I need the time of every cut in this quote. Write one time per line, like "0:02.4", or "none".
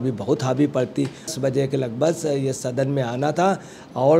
0:01.3